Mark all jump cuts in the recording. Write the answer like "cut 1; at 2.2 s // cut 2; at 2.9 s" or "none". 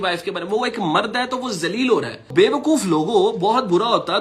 cut 1; at 2.3 s